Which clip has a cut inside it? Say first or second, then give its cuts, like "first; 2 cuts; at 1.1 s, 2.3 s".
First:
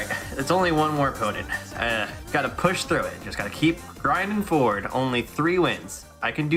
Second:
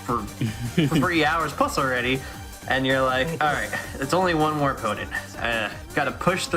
second; 1 cut; at 2.5 s